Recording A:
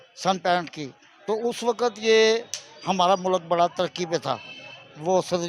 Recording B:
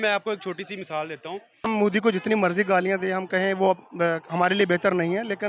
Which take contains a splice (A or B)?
B